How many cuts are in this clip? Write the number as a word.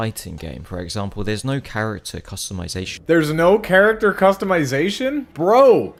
zero